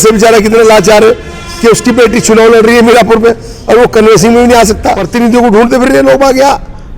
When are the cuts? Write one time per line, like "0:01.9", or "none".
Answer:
0:04.8